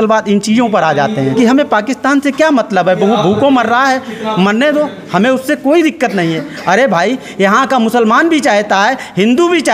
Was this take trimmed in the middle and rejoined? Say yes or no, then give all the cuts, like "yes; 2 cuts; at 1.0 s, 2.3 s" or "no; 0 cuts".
yes; 1 cut; at 1.3 s